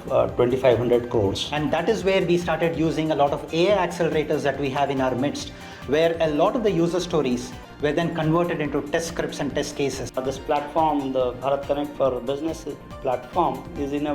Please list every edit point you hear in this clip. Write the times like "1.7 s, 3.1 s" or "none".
1.5 s, 10.2 s